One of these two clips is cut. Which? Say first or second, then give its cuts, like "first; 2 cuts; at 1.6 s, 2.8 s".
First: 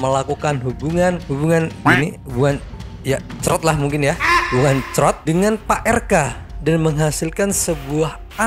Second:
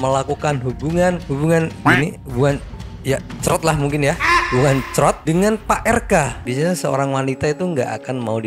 second; 1 cut; at 6.4 s